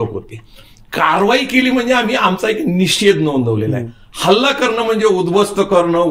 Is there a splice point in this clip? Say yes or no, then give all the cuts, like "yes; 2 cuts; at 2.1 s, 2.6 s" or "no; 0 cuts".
no; 0 cuts